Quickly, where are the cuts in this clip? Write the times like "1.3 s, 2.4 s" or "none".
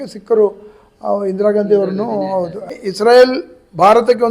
2.8 s